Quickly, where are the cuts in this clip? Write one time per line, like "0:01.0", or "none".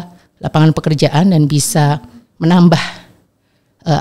none